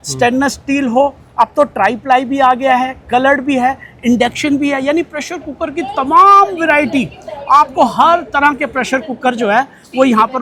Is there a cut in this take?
no; 0 cuts

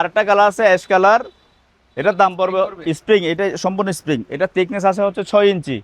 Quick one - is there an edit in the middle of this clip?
no; 0 cuts

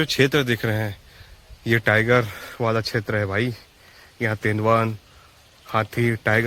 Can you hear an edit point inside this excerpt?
no; 0 cuts

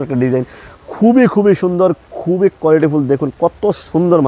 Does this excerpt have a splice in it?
no; 0 cuts

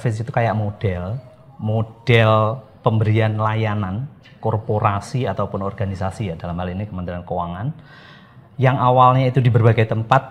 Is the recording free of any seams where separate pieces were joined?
yes; 0 cuts

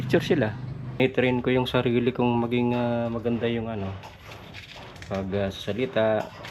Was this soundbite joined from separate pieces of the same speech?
yes; 1 cut; at 1.0 s

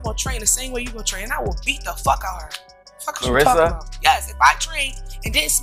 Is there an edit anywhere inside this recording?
no; 0 cuts

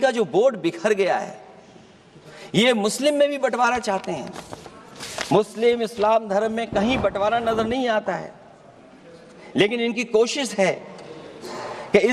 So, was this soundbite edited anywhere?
no; 0 cuts

